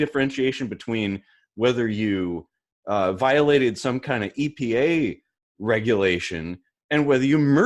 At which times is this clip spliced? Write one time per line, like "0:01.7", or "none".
none